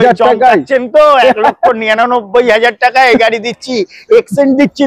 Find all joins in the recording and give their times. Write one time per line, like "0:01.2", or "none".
none

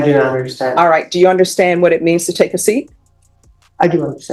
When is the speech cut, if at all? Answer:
none

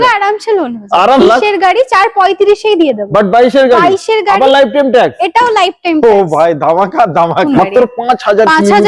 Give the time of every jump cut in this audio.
0:01.2
0:07.5

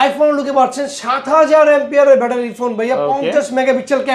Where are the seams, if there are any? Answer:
none

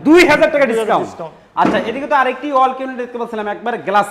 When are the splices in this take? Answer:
none

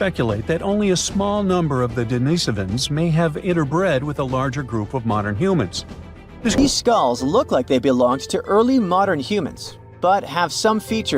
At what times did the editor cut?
0:06.6

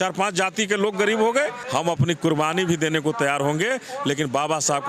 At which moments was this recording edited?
0:01.6

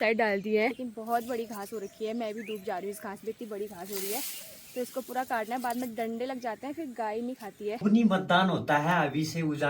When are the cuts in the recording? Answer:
0:00.9
0:07.8

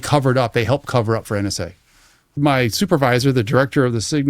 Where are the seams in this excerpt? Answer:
0:02.3

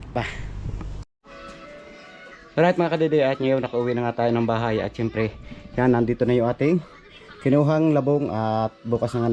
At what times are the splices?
0:01.0

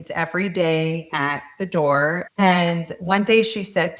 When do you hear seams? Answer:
0:02.2

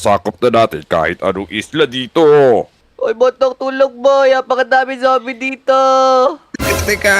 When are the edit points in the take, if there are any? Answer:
0:02.8

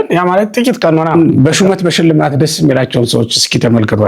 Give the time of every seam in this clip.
0:01.1

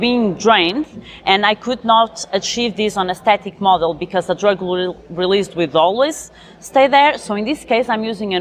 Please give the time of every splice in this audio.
none

